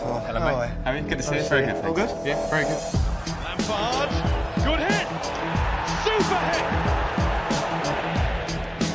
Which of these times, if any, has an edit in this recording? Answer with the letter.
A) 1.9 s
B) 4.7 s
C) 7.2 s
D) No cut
C